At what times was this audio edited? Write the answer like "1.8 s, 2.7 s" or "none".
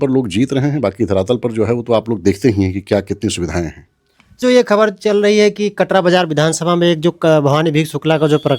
4.4 s